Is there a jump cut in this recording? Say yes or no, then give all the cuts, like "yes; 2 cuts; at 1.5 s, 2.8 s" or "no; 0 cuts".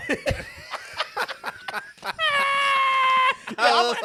no; 0 cuts